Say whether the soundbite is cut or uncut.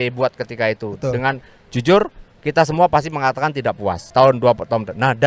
cut